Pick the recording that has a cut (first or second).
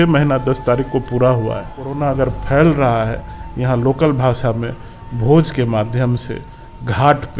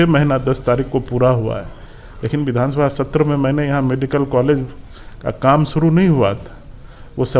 first